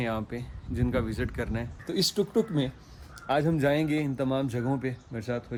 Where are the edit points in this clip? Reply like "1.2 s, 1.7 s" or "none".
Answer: none